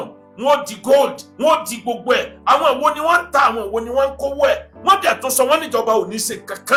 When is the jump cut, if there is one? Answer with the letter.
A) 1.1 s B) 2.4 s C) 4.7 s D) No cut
D